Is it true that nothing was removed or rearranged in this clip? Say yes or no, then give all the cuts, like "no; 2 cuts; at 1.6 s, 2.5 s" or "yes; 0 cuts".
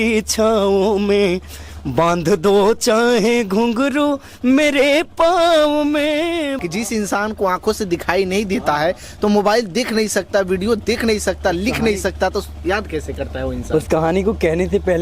no; 1 cut; at 6.5 s